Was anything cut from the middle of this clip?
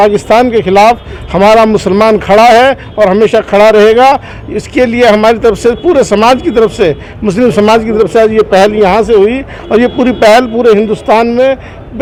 no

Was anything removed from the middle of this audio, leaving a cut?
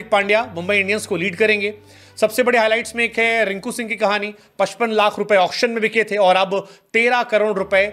no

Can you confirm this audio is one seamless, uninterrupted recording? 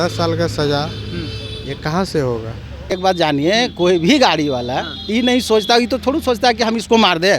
no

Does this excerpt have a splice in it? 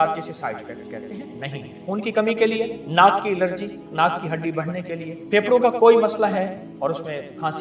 yes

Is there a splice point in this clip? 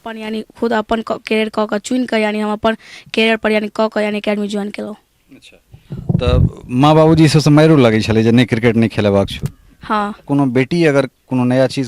yes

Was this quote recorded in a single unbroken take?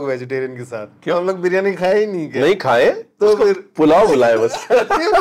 yes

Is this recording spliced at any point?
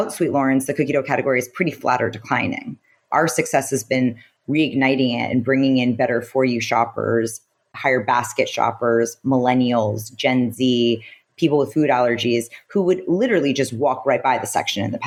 no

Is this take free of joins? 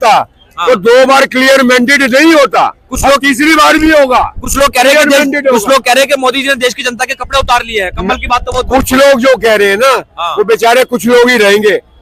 yes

